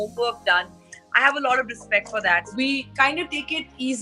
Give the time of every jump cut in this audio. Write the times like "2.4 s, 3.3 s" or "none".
2.5 s